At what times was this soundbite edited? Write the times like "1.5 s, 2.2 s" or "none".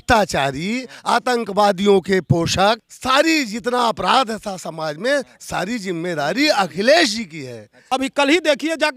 2.9 s, 7.8 s